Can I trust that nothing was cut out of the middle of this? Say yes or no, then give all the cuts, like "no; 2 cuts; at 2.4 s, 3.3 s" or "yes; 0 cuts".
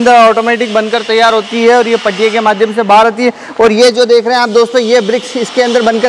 yes; 0 cuts